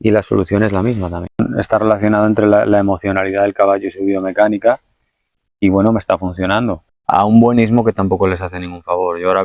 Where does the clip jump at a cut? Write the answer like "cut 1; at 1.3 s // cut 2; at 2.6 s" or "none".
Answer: cut 1; at 1.4 s // cut 2; at 6.8 s